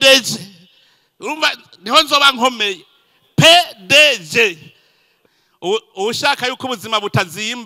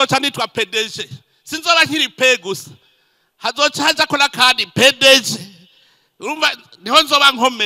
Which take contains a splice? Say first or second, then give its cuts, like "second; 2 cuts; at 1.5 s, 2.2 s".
first; 1 cut; at 5.1 s